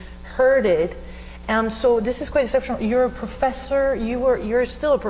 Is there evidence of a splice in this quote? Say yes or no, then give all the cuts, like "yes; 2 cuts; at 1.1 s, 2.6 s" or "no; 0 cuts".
yes; 1 cut; at 1.0 s